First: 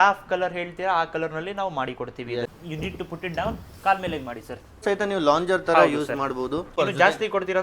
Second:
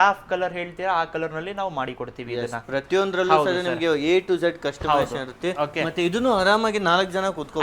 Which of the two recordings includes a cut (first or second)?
first